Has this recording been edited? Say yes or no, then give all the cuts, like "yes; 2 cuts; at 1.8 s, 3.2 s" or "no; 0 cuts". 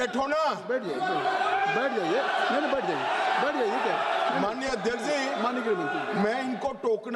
no; 0 cuts